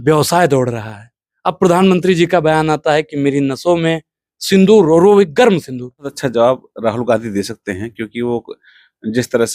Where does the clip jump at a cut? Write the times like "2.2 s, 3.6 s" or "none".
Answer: 6.2 s